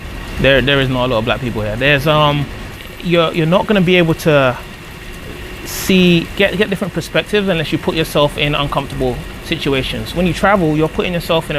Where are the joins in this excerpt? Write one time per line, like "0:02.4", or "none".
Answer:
0:02.6